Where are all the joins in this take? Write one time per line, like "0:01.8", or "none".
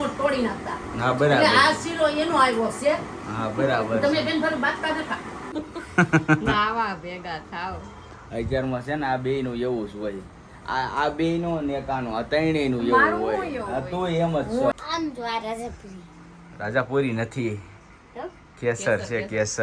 0:05.4
0:14.7